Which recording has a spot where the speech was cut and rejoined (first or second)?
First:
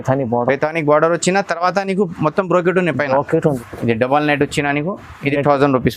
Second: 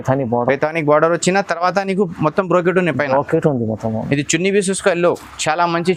first